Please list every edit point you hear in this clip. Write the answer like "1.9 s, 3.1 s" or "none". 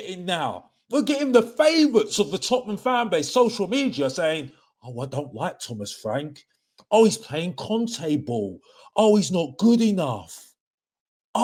none